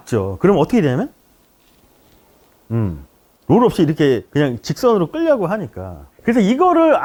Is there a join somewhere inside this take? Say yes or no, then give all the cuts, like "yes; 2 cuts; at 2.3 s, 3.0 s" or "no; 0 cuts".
no; 0 cuts